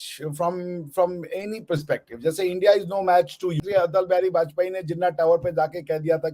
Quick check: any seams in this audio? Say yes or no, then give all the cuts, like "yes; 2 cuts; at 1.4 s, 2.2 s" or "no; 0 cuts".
yes; 1 cut; at 3.6 s